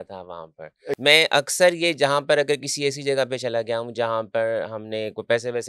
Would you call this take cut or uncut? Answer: cut